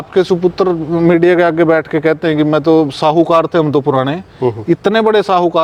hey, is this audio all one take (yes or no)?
yes